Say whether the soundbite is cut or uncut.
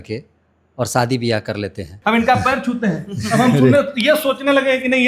cut